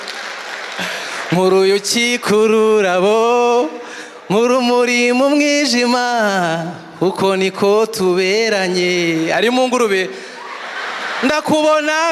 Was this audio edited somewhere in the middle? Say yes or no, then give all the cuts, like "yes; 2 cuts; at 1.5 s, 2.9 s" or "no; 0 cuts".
no; 0 cuts